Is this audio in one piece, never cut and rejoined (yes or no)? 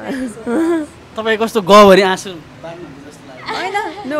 yes